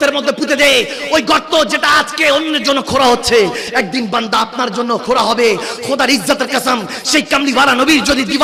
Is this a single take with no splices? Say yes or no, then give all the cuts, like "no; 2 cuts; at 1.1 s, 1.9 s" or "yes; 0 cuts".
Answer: yes; 0 cuts